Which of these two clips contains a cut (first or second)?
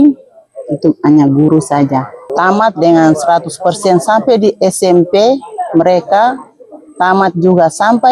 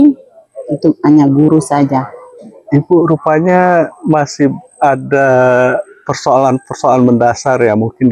first